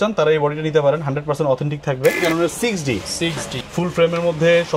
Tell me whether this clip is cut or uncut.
cut